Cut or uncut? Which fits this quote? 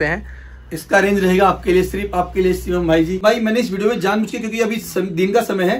cut